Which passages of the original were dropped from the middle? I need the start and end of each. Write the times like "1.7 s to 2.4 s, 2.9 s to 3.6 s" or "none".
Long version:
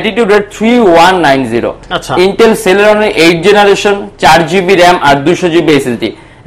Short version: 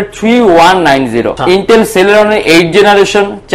1.7 s to 2.0 s